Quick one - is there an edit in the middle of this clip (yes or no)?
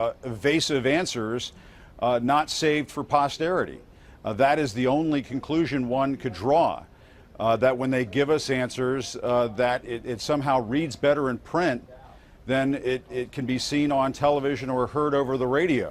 no